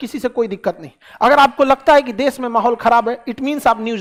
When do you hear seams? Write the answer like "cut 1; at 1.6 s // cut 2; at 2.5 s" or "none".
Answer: none